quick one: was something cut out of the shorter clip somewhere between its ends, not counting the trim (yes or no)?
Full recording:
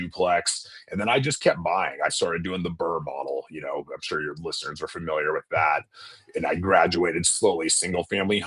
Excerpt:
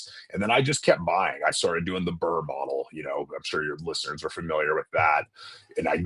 no